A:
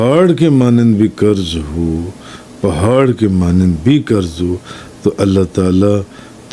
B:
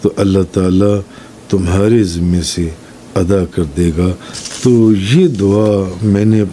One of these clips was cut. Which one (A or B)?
B